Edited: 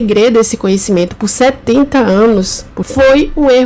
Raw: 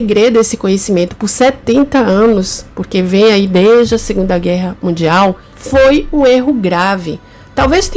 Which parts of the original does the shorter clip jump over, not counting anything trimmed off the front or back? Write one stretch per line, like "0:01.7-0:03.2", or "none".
0:02.7-0:05.5